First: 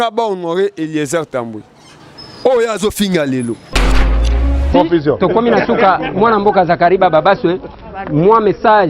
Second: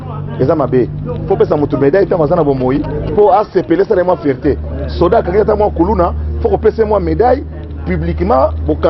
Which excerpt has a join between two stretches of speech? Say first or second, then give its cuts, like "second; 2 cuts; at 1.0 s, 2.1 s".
first; 1 cut; at 4.1 s